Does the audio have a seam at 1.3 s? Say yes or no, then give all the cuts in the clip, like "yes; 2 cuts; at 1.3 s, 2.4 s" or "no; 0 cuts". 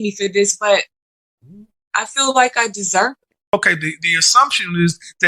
no; 1 cut; at 3.3 s